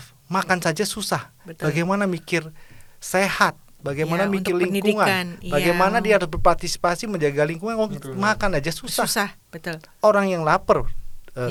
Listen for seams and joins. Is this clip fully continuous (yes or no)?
yes